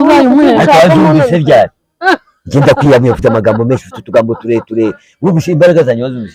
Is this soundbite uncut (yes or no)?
yes